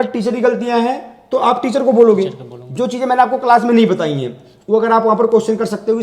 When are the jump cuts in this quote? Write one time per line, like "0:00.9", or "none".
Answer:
none